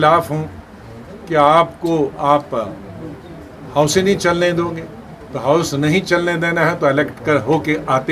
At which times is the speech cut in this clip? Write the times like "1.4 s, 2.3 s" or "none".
none